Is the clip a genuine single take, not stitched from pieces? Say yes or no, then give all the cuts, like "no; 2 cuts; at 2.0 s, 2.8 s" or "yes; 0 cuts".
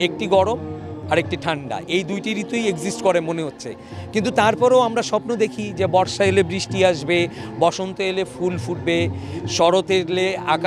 yes; 0 cuts